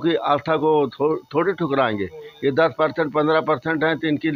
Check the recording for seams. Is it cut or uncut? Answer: uncut